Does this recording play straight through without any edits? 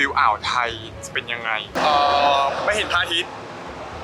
no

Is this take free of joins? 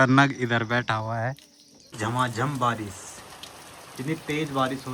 no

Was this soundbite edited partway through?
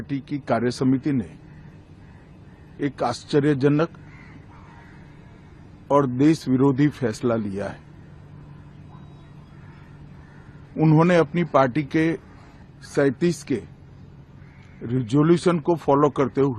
no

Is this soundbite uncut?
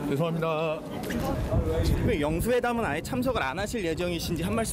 no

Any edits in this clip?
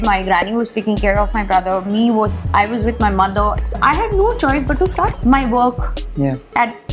yes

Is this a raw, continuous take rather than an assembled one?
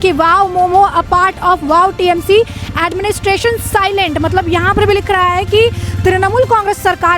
yes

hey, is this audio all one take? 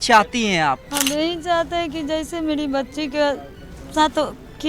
no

